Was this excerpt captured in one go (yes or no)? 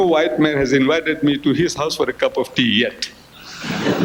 yes